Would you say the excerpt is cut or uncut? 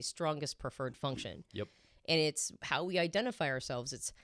uncut